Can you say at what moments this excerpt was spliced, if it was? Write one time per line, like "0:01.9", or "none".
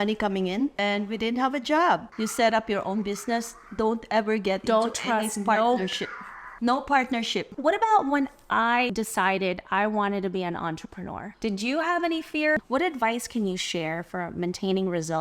0:00.7
0:02.1
0:07.5
0:08.9
0:12.6